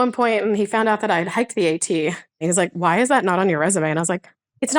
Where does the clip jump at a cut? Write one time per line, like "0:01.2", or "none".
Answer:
0:02.4